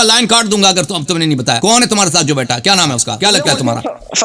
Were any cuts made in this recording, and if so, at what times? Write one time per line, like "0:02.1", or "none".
0:01.6
0:03.1